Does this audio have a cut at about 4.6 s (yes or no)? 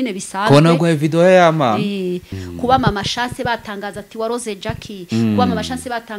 no